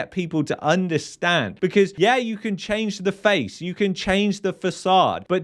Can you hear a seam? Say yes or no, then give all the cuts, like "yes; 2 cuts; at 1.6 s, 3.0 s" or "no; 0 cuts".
yes; 1 cut; at 1.9 s